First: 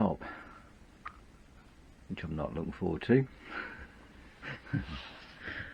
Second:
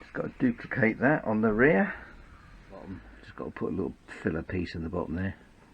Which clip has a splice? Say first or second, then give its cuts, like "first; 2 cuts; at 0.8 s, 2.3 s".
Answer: second; 1 cut; at 2.8 s